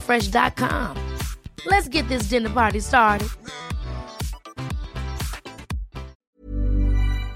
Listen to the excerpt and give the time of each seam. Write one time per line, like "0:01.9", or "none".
0:06.2